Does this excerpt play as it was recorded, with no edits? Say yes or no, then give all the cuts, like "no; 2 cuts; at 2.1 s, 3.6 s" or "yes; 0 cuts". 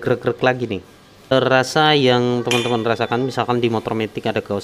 no; 1 cut; at 1.3 s